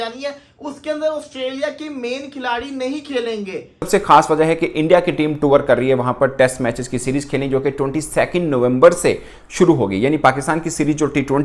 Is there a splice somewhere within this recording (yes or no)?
yes